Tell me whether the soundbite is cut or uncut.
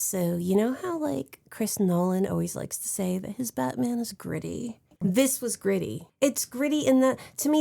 cut